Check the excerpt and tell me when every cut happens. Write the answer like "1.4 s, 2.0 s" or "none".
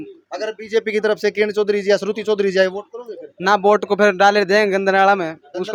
none